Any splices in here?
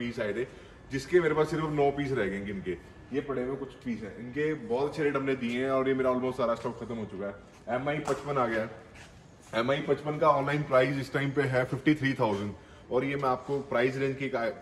no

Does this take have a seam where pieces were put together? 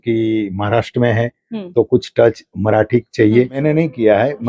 yes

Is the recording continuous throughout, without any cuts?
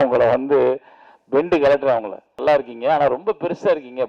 no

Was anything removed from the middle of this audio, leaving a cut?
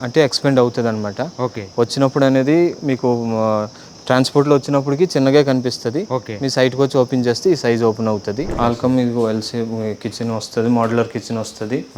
yes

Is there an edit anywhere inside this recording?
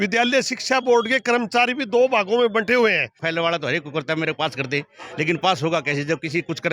yes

